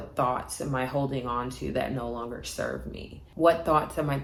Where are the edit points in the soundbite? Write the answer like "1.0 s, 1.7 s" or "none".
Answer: none